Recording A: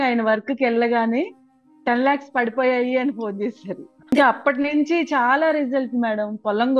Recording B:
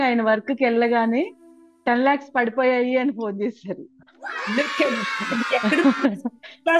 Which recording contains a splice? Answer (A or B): A